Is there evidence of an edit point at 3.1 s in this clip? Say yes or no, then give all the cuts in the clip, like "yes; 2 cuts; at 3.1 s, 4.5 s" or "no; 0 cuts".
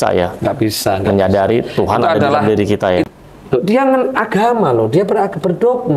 yes; 1 cut; at 3.1 s